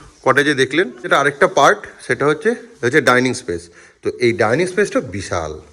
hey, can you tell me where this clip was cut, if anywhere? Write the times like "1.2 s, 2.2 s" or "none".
1.1 s